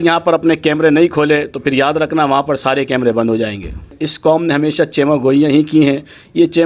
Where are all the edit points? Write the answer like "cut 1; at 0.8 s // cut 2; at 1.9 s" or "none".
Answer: cut 1; at 4.0 s